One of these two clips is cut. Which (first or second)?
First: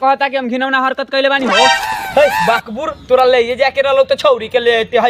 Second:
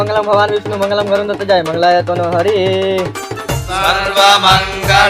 first